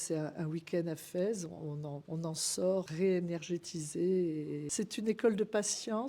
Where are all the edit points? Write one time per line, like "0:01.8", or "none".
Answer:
0:02.0
0:02.9
0:04.7